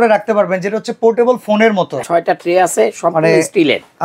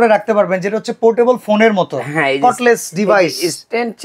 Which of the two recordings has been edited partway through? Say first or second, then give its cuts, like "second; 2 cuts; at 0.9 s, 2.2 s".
first; 1 cut; at 2.0 s